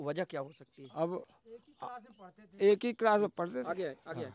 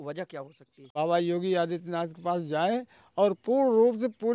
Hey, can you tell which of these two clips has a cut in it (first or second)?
second